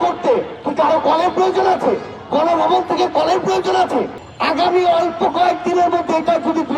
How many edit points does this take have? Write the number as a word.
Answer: one